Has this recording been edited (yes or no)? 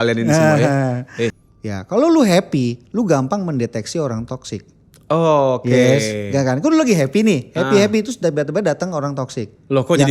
yes